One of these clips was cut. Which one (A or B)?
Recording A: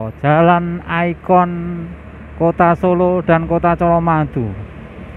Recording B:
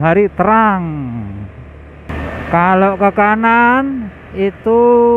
B